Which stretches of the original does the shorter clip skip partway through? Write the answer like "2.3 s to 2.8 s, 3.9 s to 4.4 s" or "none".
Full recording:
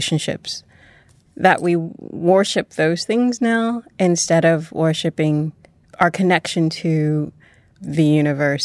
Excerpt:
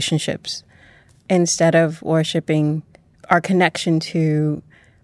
1.2 s to 3.9 s